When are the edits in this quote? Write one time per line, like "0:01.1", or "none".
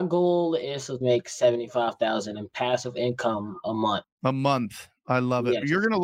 0:00.9